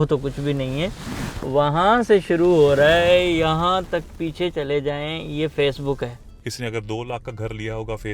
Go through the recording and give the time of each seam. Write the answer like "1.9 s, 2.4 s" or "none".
6.3 s